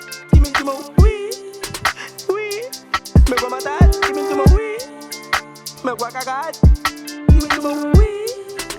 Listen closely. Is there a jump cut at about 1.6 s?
no; 0 cuts

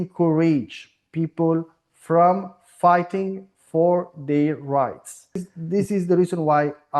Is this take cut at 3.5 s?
no; 1 cut; at 5.5 s

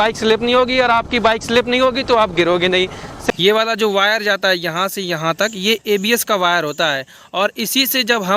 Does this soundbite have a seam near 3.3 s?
yes; 1 cut; at 3.3 s

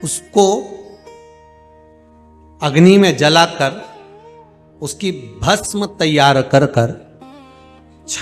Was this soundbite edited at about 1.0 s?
yes; 2 cuts; at 1.0 s, 2.6 s

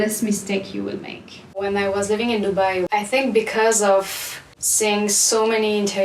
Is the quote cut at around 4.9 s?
no; 2 cuts; at 1.5 s, 2.8 s

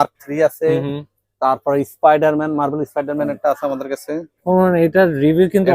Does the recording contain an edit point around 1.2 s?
no; 1 cut; at 4.3 s

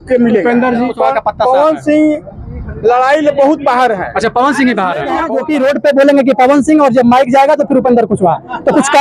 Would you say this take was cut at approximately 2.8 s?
no; 2 cuts; at 0.9 s, 5.3 s

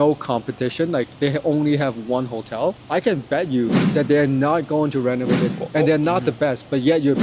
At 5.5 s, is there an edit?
yes; 2 cuts; at 2.8 s, 5.5 s

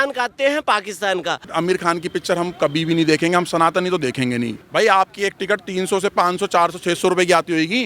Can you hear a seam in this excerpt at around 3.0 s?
no; 2 cuts; at 1.5 s, 4.6 s

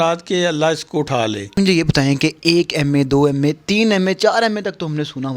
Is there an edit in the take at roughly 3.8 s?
no; 1 cut; at 1.5 s

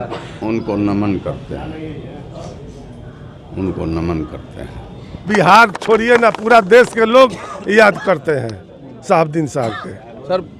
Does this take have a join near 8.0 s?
no; 1 cut; at 5.3 s

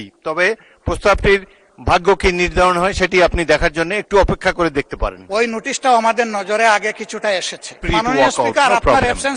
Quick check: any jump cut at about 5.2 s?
yes; 2 cuts; at 5.2 s, 7.7 s

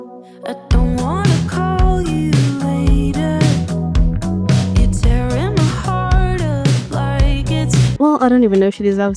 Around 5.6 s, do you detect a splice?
no; 1 cut; at 7.9 s

